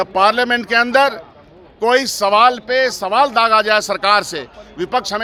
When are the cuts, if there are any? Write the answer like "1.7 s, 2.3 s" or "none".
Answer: none